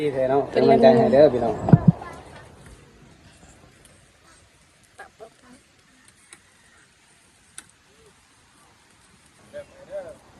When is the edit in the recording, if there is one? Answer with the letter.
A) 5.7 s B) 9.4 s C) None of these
B